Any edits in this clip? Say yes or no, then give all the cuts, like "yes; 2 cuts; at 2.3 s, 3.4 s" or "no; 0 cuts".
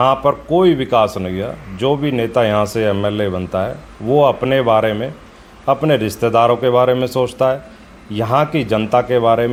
no; 0 cuts